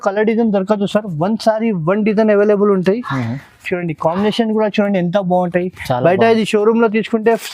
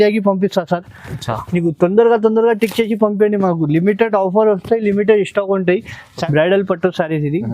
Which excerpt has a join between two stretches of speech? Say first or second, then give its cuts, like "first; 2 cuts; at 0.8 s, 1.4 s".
second; 1 cut; at 6.2 s